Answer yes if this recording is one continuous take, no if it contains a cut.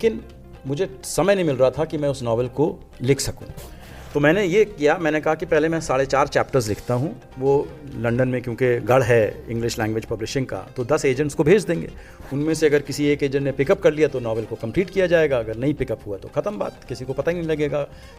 yes